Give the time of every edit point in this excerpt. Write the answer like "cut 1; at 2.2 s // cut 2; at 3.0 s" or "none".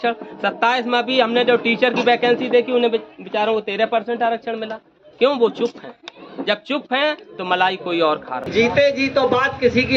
cut 1; at 8.5 s

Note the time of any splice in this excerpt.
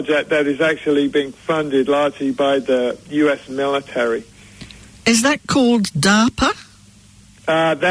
none

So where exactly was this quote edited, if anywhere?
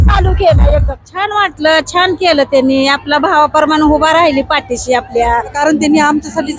cut 1; at 1.0 s // cut 2; at 5.6 s

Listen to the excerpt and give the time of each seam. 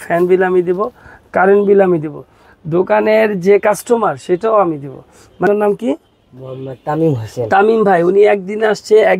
cut 1; at 5.5 s

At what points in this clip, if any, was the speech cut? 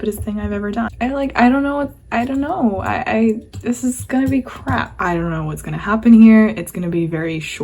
cut 1; at 0.9 s // cut 2; at 5.0 s

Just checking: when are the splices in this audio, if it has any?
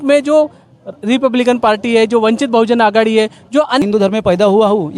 cut 1; at 3.8 s

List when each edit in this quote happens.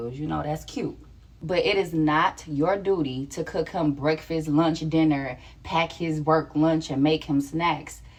none

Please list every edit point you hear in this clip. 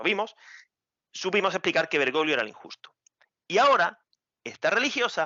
none

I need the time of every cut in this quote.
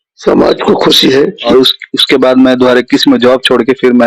cut 1; at 1.4 s

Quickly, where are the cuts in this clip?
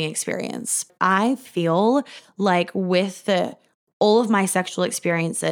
cut 1; at 0.9 s

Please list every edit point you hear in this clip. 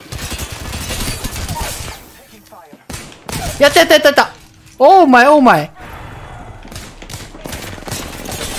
cut 1; at 5.8 s

